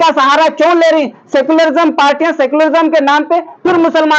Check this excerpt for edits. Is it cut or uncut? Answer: uncut